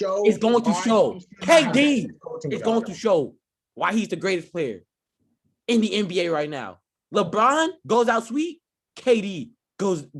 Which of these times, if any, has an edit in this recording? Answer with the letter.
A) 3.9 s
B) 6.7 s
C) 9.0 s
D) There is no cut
D